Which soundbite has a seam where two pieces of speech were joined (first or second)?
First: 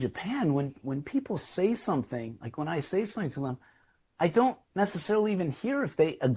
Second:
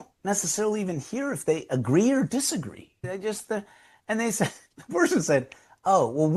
second